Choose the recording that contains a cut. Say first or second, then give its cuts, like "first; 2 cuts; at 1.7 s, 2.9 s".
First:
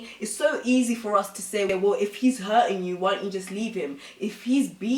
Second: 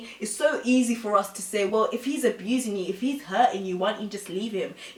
first; 1 cut; at 1.7 s